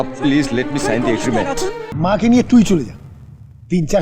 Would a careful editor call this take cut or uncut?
cut